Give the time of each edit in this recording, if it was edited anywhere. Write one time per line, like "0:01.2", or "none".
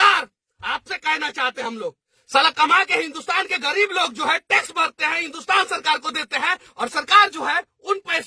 0:01.6